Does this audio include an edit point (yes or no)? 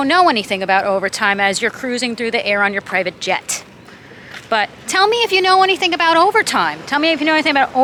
no